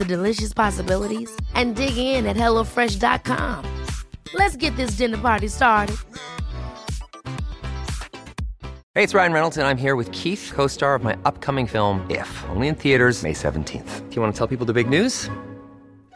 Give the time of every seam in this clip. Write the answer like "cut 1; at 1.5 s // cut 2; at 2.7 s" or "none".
cut 1; at 8.7 s